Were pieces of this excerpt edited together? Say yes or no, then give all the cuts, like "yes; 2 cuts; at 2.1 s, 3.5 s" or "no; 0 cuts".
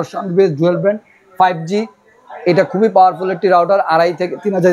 no; 0 cuts